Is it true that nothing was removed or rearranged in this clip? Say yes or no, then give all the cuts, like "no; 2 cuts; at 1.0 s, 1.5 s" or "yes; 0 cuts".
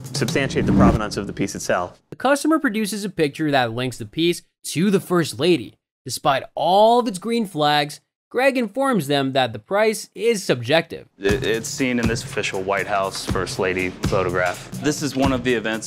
yes; 0 cuts